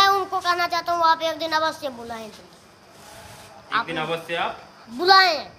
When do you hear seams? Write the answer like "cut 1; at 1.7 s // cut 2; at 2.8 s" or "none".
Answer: none